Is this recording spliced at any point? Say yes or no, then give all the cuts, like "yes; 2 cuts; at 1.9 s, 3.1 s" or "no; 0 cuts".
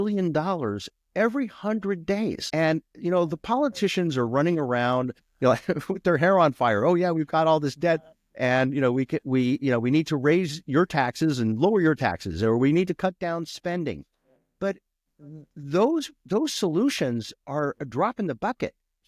yes; 1 cut; at 2.4 s